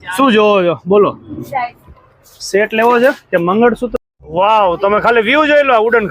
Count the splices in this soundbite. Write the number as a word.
one